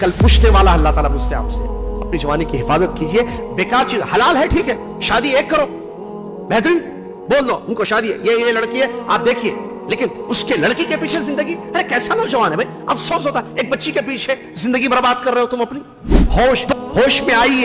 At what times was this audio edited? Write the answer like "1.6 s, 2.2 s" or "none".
16.3 s

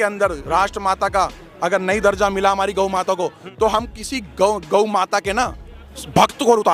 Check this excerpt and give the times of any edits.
3.4 s

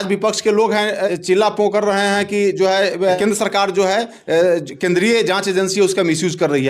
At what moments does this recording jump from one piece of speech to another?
1.1 s, 3.2 s

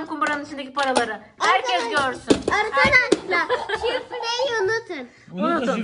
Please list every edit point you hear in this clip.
none

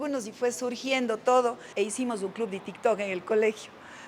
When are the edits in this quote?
1.6 s

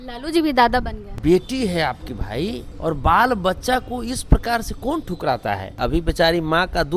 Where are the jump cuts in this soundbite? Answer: 1.2 s, 2.7 s, 5.7 s

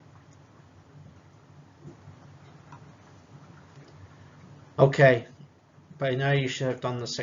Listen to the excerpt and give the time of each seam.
3.4 s

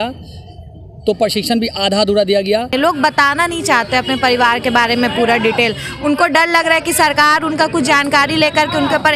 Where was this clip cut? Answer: 2.7 s

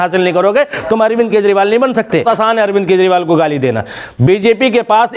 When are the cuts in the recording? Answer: 2.2 s

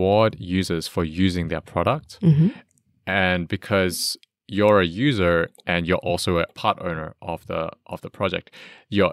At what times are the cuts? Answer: none

